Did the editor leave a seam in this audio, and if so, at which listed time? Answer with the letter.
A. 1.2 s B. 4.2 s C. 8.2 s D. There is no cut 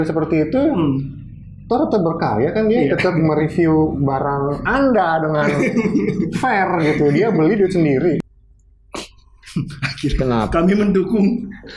C